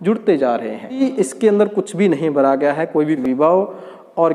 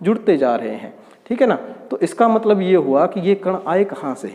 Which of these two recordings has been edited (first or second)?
first